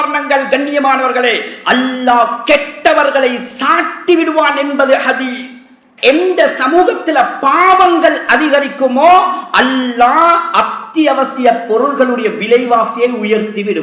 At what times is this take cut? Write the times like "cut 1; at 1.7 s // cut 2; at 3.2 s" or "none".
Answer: cut 1; at 5.8 s